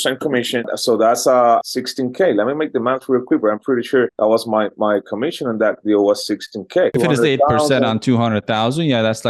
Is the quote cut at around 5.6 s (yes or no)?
no